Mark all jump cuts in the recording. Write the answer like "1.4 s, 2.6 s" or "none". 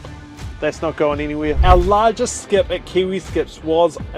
1.6 s